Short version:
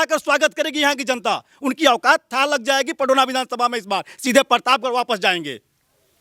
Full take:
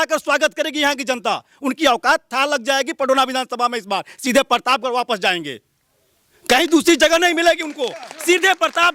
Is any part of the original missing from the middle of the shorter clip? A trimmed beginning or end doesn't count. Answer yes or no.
no